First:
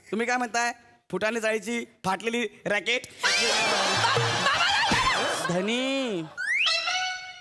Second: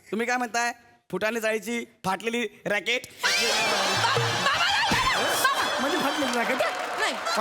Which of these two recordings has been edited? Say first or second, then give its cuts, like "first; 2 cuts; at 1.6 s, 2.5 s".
first; 1 cut; at 5.4 s